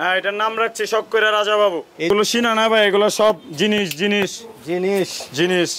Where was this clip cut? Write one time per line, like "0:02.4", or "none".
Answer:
0:02.1